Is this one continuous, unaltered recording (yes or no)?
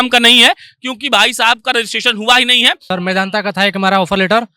no